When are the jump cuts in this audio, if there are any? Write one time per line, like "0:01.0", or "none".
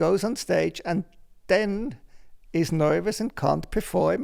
none